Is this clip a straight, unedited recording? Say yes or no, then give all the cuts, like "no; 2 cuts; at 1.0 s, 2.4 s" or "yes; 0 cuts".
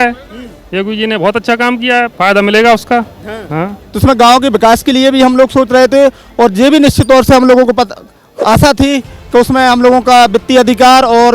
no; 1 cut; at 3.8 s